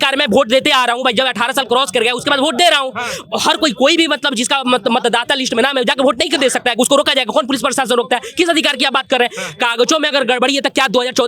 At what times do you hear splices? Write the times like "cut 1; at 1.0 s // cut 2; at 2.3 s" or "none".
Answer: none